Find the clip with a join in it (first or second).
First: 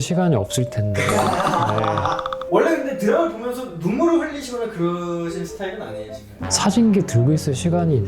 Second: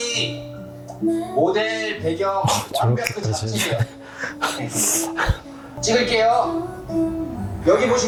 first